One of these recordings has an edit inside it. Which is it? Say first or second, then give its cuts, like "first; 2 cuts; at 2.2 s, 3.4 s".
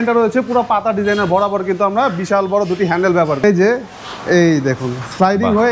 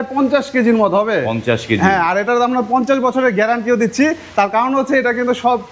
first; 1 cut; at 3.4 s